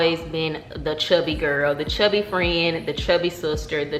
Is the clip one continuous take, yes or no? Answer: yes